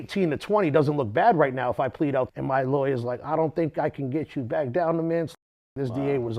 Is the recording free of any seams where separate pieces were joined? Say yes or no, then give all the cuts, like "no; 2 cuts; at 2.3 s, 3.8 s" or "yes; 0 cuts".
no; 2 cuts; at 2.3 s, 5.3 s